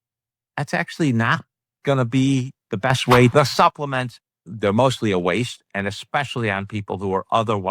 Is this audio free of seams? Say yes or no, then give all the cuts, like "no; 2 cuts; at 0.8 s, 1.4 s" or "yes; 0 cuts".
no; 2 cuts; at 3.3 s, 4.5 s